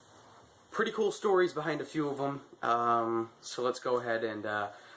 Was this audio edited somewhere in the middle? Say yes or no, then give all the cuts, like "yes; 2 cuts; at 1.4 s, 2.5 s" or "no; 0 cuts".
yes; 1 cut; at 2.0 s